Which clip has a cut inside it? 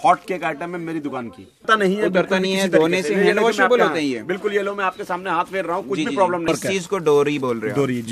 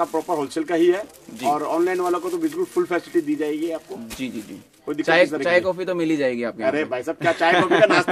first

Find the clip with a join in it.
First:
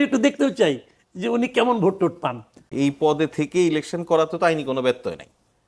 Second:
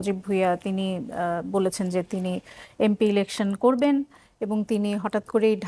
first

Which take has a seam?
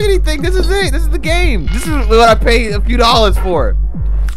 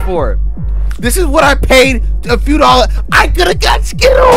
first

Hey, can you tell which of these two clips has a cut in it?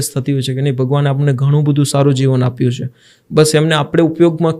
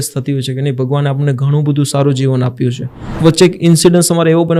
second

